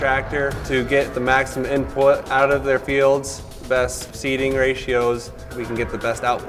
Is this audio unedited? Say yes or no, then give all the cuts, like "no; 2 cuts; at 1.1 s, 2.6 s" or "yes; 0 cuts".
no; 1 cut; at 5.5 s